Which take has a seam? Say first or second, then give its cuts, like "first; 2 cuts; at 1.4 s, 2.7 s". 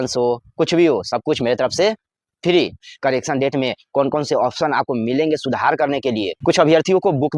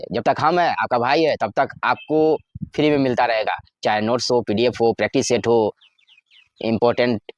first; 2 cuts; at 2.8 s, 6.4 s